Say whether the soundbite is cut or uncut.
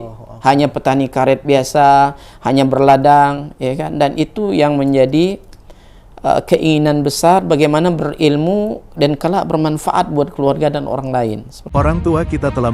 cut